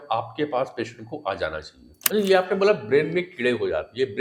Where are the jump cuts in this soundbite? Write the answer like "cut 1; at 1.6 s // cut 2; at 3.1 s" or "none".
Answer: cut 1; at 2.0 s

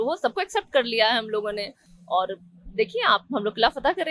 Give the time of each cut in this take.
none

